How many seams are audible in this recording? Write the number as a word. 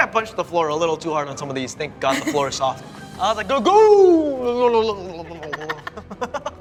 zero